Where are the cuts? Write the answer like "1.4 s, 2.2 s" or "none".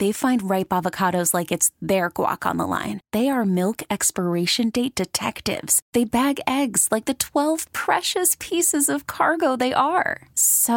none